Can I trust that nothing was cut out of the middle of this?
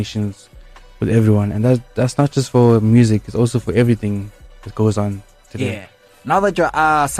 yes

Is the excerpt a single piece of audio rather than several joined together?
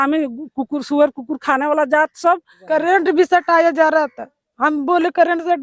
no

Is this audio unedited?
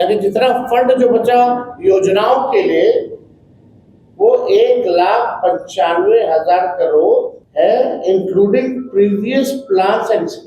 no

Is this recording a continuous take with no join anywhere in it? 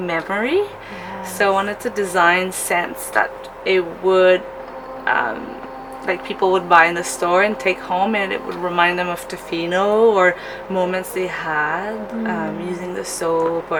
yes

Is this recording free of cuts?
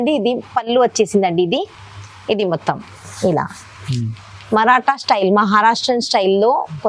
yes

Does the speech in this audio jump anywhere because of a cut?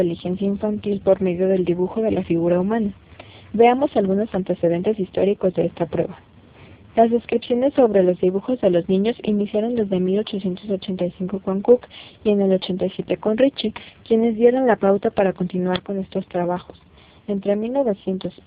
no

